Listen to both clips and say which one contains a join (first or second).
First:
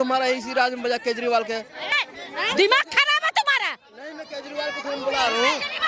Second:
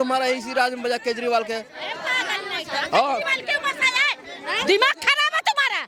first